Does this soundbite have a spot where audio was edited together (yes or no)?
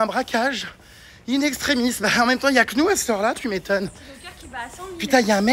no